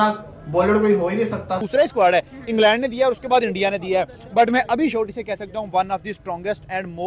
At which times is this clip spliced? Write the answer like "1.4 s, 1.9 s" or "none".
1.6 s